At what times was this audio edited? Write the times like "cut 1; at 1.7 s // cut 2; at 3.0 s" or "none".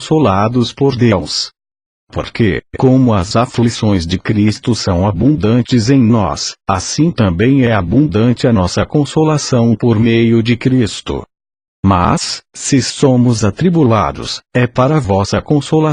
cut 1; at 8.4 s